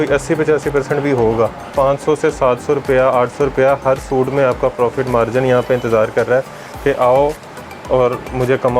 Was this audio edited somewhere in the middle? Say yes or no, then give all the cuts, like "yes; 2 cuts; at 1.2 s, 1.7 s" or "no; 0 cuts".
yes; 1 cut; at 1.7 s